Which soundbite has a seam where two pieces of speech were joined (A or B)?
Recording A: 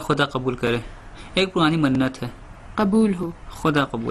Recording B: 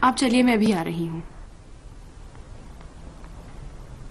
A